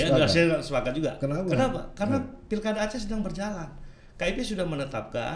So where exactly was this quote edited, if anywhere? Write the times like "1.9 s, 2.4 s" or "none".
none